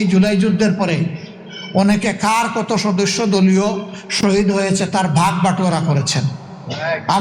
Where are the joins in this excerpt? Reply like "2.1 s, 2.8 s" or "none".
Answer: none